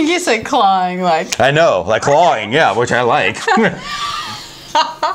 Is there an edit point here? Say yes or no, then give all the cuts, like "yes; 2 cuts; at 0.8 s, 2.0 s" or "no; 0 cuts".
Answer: no; 0 cuts